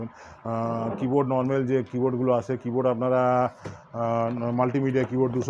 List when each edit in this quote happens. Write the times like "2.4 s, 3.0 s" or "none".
none